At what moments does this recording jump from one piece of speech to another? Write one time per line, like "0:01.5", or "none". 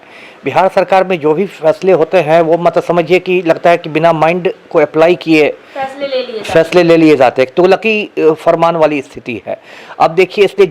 none